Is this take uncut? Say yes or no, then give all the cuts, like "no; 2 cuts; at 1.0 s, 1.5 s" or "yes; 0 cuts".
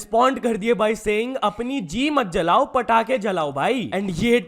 no; 1 cut; at 1.0 s